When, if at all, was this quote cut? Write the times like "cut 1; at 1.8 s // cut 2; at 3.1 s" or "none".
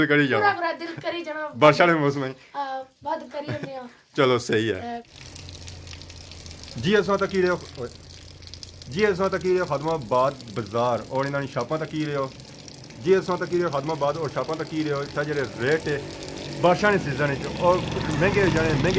none